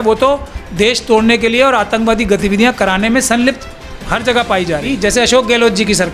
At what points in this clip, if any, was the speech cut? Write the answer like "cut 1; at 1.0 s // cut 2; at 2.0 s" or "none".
cut 1; at 4.9 s